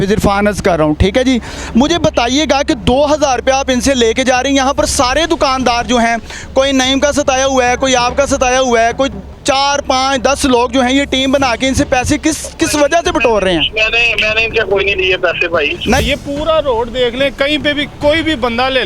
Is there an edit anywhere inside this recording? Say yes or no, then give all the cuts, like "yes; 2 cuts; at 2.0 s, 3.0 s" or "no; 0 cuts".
yes; 1 cut; at 16.0 s